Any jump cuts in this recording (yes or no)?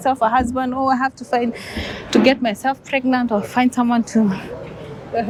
no